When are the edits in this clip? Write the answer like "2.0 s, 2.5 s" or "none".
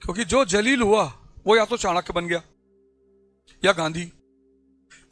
none

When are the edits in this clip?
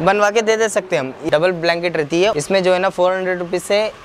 1.2 s, 2.3 s

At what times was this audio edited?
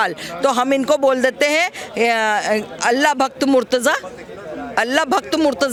none

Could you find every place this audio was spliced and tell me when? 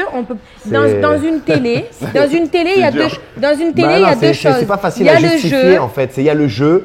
none

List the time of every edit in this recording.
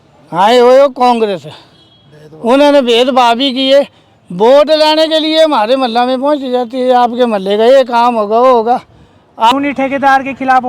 9.5 s

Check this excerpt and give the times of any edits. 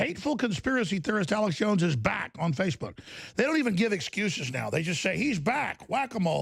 none

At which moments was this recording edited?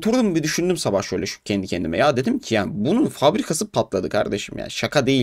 none

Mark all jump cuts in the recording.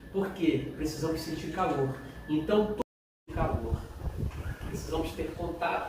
2.8 s

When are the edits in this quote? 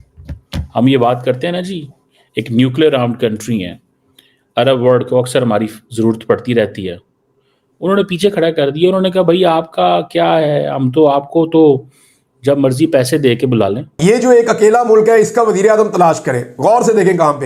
14.0 s

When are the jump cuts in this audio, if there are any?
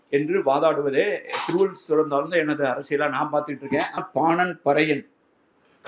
4.0 s

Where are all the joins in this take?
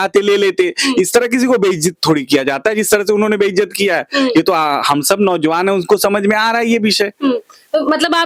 none

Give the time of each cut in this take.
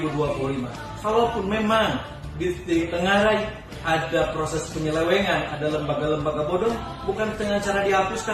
none

